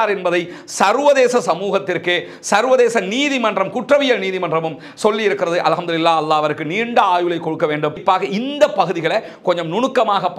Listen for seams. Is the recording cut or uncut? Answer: cut